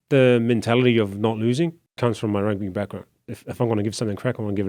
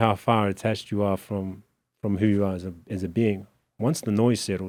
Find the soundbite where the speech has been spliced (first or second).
first